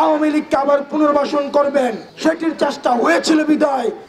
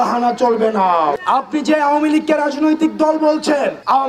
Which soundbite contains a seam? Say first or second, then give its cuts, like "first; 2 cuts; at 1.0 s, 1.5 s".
second; 1 cut; at 1.1 s